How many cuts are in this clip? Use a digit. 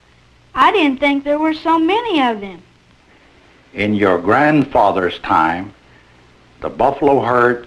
1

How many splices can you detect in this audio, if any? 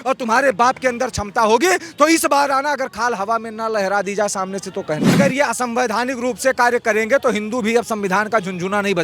1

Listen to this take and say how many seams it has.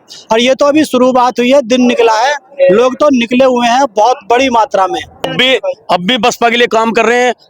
1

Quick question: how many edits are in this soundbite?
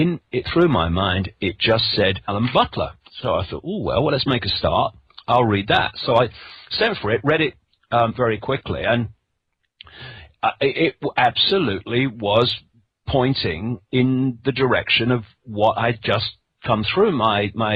0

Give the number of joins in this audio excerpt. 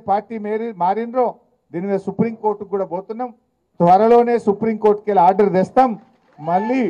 0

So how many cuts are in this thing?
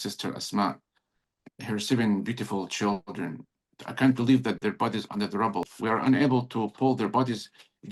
1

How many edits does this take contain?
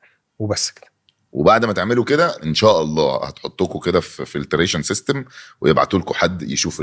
1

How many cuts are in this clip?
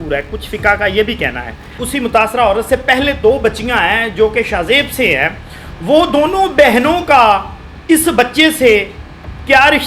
1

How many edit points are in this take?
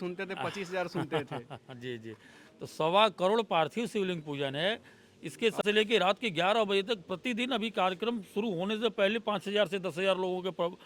1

